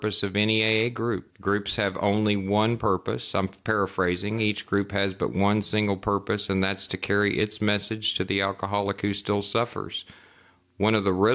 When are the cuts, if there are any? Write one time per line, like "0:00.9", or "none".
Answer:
0:01.3